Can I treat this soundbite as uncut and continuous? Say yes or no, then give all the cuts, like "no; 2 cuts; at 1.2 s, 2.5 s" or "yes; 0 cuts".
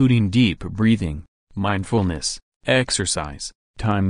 no; 1 cut; at 1.2 s